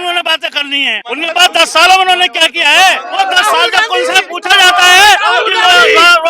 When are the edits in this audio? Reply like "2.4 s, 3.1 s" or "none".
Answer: 1.0 s, 3.1 s